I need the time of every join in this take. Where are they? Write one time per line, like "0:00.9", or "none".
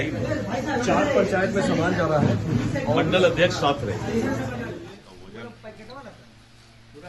0:04.8